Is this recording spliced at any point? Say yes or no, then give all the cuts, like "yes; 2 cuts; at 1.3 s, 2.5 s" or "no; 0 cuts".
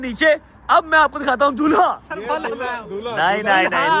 no; 0 cuts